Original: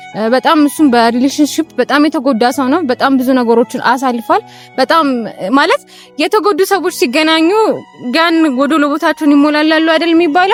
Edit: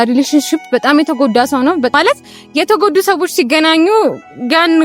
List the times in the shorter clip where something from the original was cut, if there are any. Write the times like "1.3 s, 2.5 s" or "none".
2.0 s